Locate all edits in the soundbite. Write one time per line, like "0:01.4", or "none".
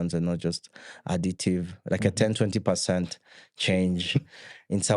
none